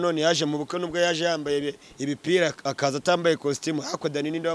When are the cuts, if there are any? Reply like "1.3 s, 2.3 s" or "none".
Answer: none